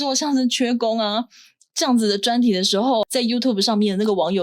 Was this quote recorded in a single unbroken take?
no; 1 cut; at 3.0 s

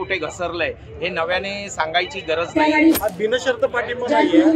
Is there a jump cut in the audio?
yes; 1 cut; at 3.0 s

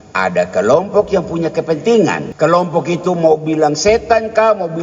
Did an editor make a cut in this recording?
yes; 1 cut; at 2.3 s

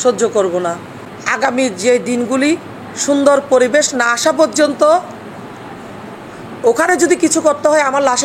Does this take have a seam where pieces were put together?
no; 0 cuts

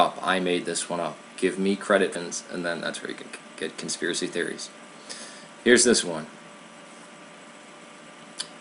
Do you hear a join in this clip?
no; 0 cuts

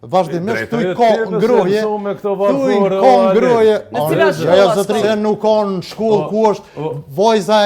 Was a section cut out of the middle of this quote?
yes; 1 cut; at 5.0 s

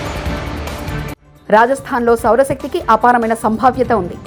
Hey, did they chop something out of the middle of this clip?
no; 0 cuts

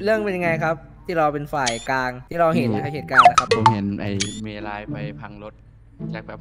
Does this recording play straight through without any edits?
no; 3 cuts; at 2.2 s, 3.2 s, 3.7 s

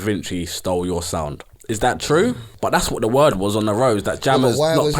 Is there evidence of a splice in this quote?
yes; 2 cuts; at 1.5 s, 2.5 s

